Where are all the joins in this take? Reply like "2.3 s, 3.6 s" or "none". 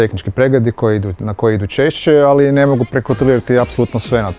none